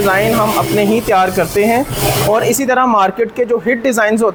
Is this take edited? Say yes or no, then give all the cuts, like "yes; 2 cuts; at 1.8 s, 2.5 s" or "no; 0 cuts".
no; 0 cuts